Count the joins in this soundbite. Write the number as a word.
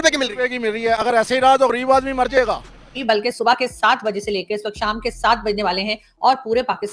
one